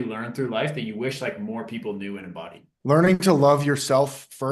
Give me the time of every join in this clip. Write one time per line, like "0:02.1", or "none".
0:02.6